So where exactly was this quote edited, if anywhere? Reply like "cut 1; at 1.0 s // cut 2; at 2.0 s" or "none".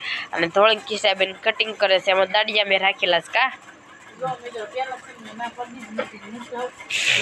none